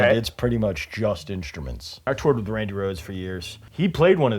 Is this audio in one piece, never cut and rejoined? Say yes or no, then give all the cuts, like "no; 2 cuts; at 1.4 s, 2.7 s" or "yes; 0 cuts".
no; 1 cut; at 2.1 s